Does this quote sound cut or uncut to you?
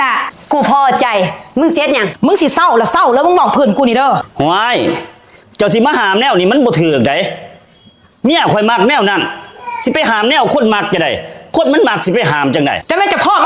uncut